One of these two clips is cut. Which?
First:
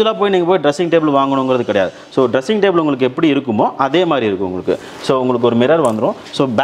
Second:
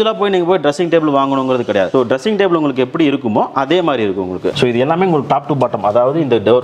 second; 2 cuts; at 1.9 s, 4.5 s

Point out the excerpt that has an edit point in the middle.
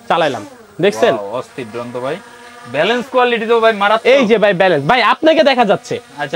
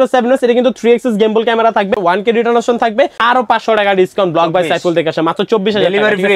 second; 2 cuts; at 2.0 s, 3.2 s

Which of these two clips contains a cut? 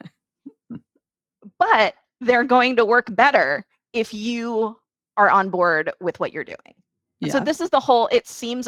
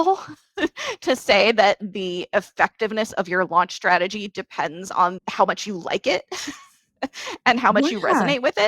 second; 1 cut; at 5.2 s

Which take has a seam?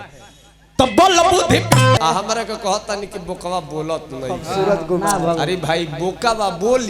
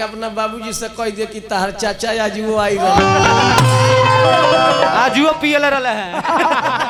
first; 1 cut; at 2.0 s

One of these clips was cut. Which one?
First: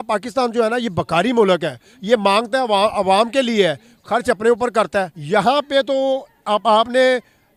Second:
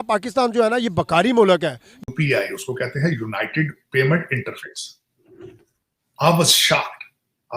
second; 1 cut; at 2.0 s

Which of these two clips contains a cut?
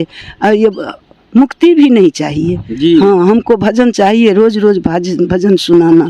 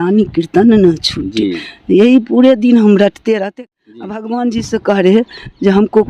second; 1 cut; at 3.6 s

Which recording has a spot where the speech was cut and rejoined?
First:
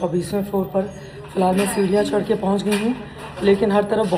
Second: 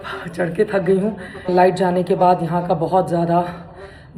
second; 1 cut; at 1.5 s

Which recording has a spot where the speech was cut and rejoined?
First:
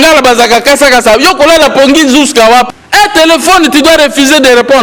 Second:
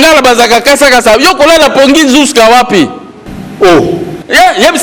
first; 1 cut; at 2.7 s

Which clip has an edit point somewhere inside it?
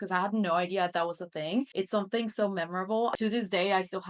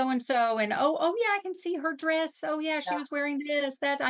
first; 2 cuts; at 1.7 s, 3.2 s

